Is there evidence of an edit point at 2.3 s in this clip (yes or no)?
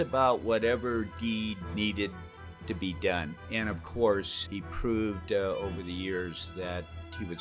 no